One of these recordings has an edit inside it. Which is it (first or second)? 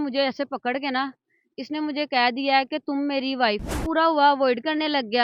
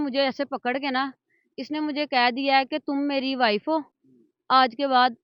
first